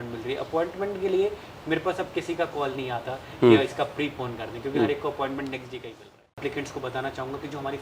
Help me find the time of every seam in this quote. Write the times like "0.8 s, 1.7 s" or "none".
6.3 s